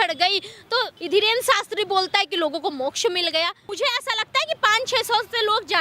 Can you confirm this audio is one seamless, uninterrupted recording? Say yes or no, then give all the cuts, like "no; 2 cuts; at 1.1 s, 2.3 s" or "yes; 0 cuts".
no; 2 cuts; at 1.0 s, 3.6 s